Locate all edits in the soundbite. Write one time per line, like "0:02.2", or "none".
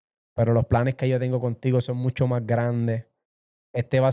none